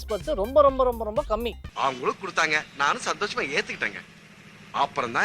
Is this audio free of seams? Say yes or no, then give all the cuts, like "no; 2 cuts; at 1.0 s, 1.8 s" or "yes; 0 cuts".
no; 1 cut; at 1.6 s